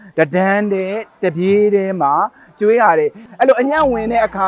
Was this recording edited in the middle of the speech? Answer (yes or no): yes